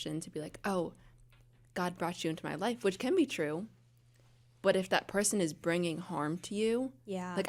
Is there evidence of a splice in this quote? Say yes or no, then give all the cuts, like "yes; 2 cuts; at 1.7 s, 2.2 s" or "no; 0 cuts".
no; 0 cuts